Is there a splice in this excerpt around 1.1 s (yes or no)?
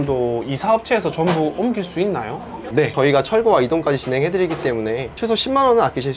no